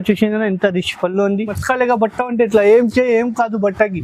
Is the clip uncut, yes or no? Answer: no